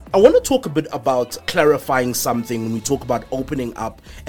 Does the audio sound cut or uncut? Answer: cut